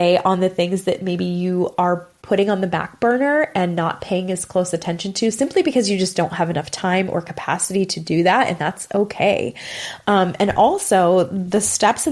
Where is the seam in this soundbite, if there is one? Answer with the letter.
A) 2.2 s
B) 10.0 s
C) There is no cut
A